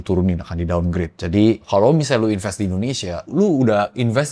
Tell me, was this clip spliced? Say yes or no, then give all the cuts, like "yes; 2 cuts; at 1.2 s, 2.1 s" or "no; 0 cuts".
no; 0 cuts